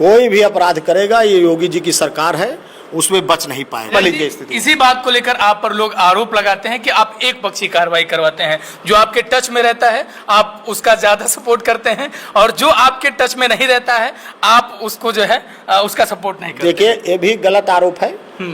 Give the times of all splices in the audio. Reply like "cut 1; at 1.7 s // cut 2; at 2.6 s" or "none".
cut 1; at 3.9 s